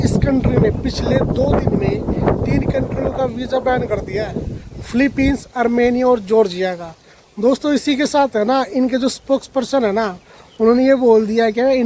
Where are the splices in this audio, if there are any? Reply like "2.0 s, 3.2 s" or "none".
none